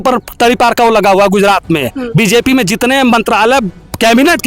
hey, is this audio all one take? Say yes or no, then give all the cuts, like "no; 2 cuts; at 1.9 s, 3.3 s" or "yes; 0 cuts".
yes; 0 cuts